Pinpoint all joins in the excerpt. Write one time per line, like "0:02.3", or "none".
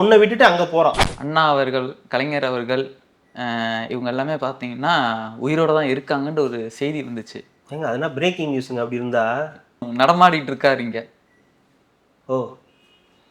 0:01.1
0:09.9